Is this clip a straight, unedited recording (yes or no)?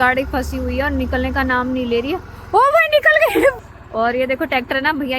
no